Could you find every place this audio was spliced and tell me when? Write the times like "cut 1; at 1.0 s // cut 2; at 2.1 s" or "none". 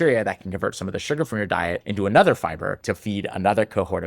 cut 1; at 1.8 s // cut 2; at 2.8 s